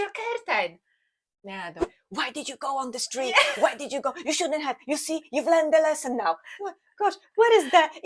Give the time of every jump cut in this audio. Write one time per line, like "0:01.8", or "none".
0:02.0

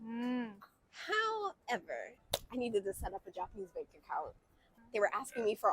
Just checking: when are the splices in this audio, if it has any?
0:02.1
0:04.7

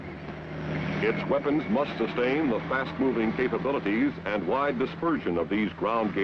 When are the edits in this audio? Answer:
0:04.5

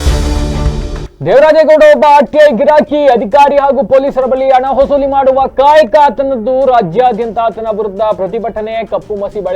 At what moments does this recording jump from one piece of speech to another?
0:01.0

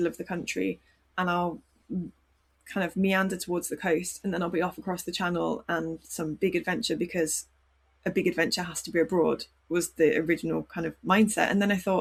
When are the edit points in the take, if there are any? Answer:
none

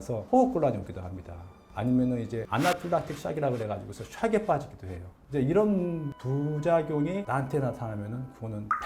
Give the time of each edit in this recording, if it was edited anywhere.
0:07.2

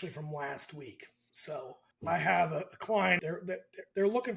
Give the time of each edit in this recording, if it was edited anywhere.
0:01.9
0:03.2

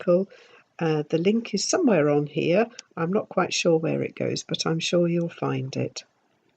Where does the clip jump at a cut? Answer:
0:02.1

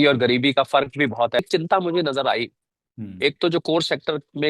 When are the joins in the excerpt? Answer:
0:01.4

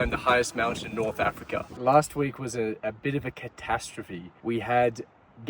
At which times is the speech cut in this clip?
0:01.7
0:04.2

